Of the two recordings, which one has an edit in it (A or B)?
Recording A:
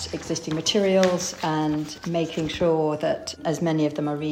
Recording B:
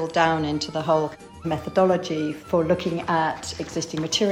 B